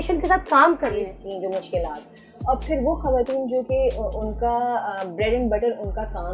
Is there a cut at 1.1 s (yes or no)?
yes